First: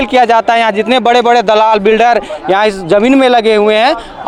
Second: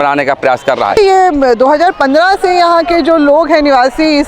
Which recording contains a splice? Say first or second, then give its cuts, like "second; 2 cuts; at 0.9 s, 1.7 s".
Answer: second; 1 cut; at 1.0 s